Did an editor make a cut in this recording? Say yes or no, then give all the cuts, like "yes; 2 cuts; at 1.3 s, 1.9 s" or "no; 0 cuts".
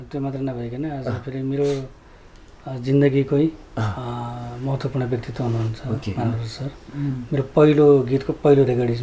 no; 0 cuts